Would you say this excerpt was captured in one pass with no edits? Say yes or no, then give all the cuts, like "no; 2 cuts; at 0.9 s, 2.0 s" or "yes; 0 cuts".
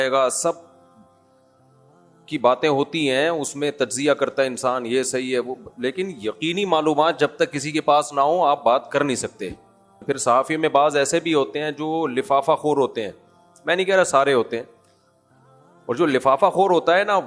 no; 1 cut; at 9.9 s